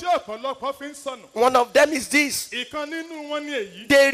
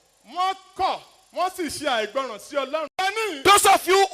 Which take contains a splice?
second; 1 cut; at 2.9 s

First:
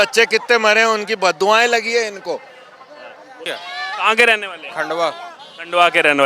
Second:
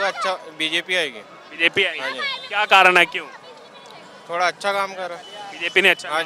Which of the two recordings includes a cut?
first; 1 cut; at 3.5 s

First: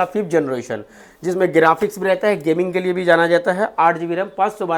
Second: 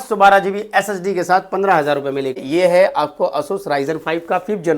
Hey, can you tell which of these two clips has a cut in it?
second; 1 cut; at 2.4 s

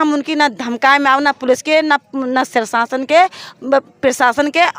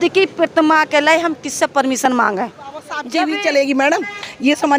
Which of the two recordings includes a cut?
second; 1 cut; at 3.0 s

